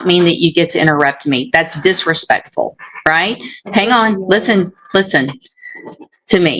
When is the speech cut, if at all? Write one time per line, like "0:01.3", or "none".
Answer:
none